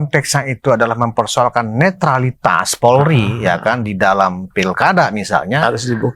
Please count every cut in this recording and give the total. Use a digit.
1